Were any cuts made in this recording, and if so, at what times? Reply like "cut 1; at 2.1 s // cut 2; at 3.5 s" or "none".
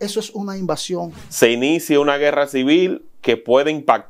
cut 1; at 1.2 s